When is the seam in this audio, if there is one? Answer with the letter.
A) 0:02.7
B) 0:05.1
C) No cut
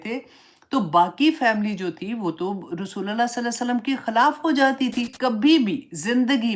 B